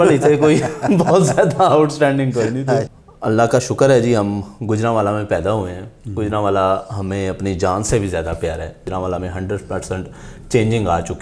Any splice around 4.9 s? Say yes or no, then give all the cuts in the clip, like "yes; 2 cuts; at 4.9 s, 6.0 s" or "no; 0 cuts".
no; 2 cuts; at 3.0 s, 8.9 s